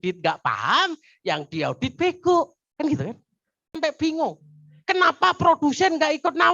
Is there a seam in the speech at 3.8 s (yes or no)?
yes